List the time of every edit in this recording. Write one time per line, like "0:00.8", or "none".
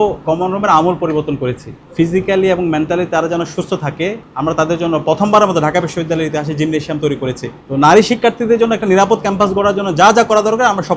0:01.9
0:07.5